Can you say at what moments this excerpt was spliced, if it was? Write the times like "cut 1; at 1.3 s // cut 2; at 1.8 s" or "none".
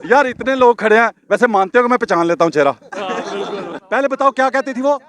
cut 1; at 3.8 s